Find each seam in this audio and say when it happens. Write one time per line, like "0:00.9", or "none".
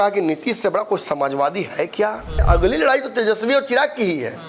0:02.4